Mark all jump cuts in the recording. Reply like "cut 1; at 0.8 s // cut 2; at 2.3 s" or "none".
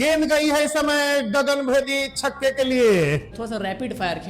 cut 1; at 3.3 s